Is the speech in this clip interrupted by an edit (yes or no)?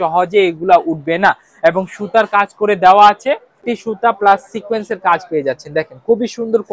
yes